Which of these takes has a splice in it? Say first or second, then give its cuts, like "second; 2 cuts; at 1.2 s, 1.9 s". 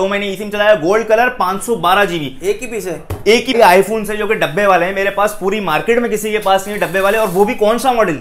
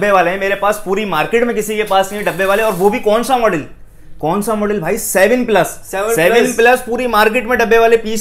first; 1 cut; at 3.6 s